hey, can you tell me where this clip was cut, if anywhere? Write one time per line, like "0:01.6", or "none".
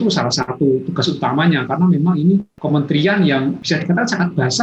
0:02.5
0:03.6